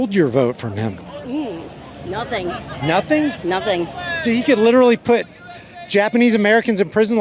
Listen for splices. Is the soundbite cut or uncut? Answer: uncut